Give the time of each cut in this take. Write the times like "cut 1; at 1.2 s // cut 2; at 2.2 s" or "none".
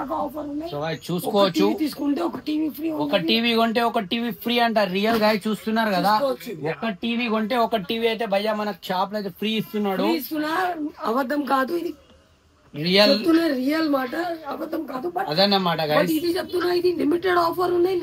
none